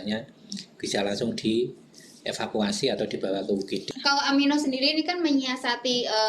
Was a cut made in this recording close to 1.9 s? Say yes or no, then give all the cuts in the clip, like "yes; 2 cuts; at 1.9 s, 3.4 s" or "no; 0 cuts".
no; 1 cut; at 3.9 s